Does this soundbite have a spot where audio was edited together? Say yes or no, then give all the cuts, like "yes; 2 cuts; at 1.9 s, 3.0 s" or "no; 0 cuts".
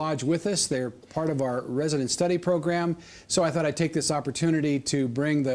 no; 0 cuts